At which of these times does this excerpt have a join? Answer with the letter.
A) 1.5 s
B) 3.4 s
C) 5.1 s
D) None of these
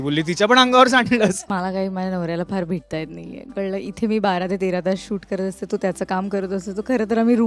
A